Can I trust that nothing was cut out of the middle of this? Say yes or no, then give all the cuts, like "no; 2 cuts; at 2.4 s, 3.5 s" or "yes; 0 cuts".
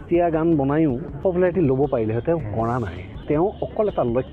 no; 2 cuts; at 1.1 s, 3.2 s